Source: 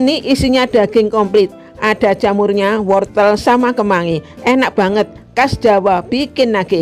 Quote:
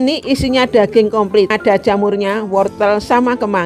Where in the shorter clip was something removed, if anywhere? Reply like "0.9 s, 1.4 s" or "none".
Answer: 1.5 s